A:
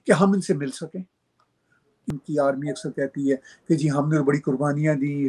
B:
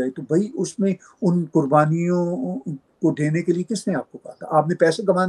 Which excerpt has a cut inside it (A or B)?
A